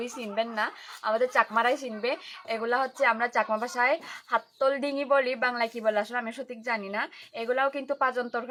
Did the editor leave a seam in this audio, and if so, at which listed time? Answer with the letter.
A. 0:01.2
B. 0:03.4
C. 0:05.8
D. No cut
D